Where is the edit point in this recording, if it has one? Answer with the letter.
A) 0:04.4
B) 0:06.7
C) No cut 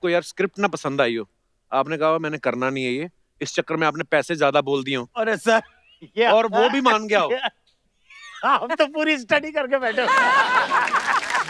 C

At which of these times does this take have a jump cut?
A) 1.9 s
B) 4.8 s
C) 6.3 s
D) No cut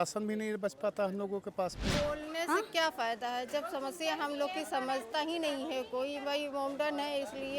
A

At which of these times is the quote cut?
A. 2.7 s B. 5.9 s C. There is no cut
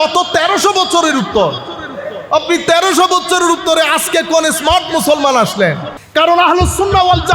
B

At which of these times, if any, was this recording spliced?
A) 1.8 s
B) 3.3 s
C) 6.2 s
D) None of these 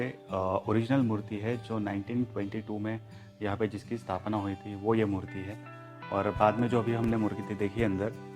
D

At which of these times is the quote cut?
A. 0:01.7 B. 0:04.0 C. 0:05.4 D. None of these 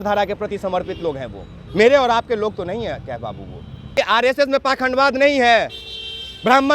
B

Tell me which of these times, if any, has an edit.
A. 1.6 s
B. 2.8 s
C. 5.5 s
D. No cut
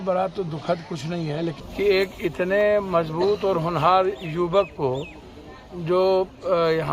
A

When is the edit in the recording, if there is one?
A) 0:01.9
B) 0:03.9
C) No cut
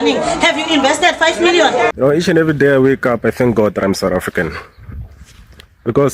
A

